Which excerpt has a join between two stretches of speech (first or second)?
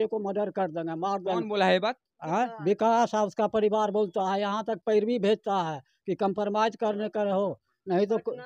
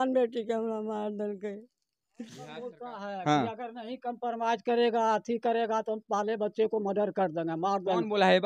second